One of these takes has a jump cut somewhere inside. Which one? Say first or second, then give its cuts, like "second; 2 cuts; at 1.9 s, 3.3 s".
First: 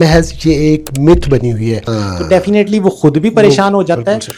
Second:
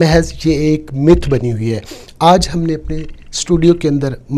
first; 1 cut; at 2.0 s